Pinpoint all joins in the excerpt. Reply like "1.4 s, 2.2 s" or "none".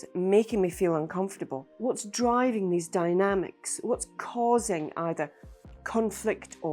1.7 s